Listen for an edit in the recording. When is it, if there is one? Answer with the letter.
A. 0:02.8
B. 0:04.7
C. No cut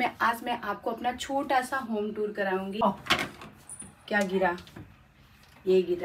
A